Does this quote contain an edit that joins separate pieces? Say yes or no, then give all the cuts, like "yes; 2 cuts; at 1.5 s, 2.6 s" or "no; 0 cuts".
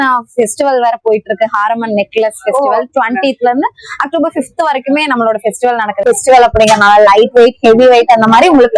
yes; 1 cut; at 6.0 s